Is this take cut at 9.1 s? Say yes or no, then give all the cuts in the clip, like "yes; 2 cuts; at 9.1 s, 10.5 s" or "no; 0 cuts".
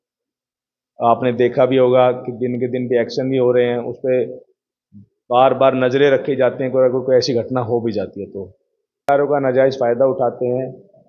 yes; 1 cut; at 9.1 s